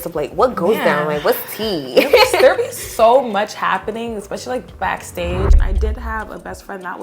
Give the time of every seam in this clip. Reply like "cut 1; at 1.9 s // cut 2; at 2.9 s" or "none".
cut 1; at 5.6 s